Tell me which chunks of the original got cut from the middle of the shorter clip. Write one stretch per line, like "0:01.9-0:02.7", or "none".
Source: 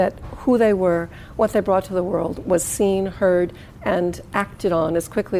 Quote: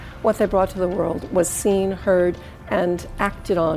none